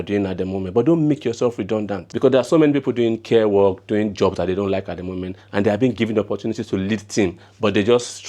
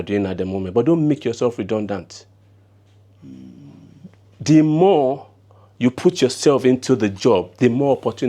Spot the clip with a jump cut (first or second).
first